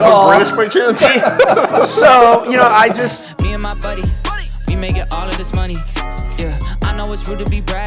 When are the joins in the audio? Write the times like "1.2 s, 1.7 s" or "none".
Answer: 3.2 s